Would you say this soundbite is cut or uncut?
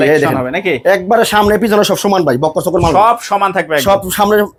uncut